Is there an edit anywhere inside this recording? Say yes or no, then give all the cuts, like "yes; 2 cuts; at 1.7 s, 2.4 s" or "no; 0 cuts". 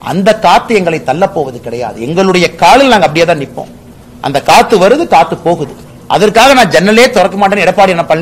no; 0 cuts